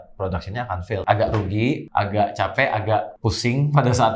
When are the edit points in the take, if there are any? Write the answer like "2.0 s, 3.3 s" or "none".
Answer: 1.0 s, 1.8 s, 3.1 s